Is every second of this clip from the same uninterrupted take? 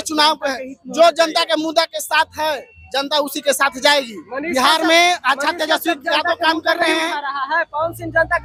yes; 0 cuts

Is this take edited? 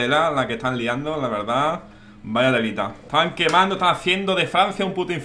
yes; 1 cut; at 3.0 s

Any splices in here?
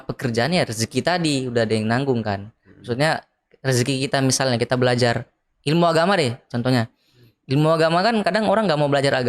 no; 0 cuts

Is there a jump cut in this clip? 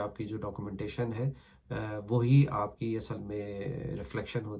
no; 0 cuts

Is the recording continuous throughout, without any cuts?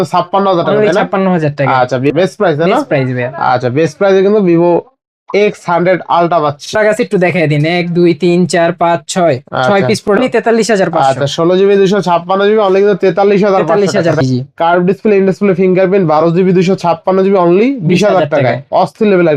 no; 4 cuts; at 2.1 s, 6.8 s, 10.2 s, 14.2 s

